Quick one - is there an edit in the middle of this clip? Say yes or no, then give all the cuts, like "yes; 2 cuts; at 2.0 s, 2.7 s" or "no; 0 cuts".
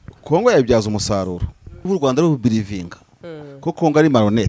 yes; 1 cut; at 1.9 s